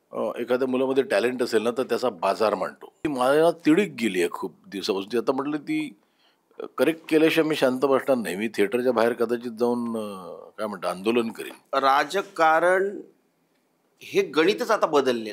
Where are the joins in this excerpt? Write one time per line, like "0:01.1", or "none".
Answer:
0:03.1
0:11.5